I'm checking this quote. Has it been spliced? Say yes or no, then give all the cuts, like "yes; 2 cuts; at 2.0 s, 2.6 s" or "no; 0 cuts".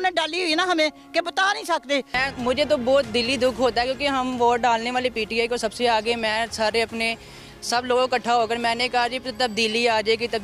yes; 1 cut; at 2.1 s